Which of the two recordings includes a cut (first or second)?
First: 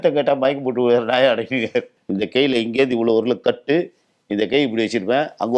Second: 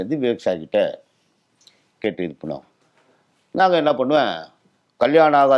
first